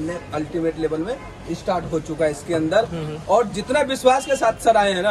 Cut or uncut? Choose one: uncut